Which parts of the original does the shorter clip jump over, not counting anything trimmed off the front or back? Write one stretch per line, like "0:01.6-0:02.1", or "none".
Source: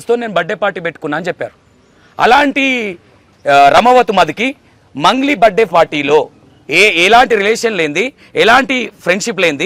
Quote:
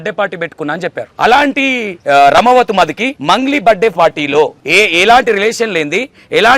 0:01.5-0:02.0
0:02.9-0:03.3
0:04.5-0:04.8
0:06.4-0:06.6